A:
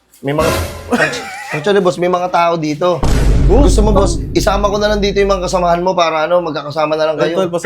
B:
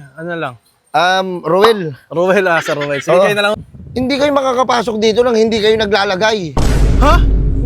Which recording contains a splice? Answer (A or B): B